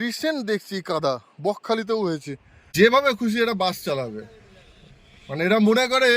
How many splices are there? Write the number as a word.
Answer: one